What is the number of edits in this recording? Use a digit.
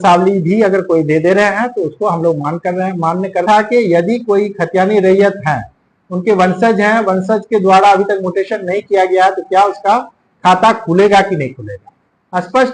1